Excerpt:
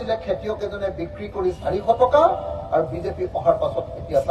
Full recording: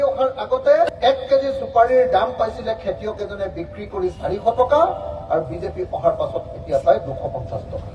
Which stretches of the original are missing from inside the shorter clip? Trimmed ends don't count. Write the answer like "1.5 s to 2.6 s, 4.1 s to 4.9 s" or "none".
none